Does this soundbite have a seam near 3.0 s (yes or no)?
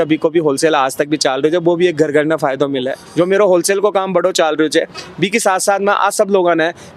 yes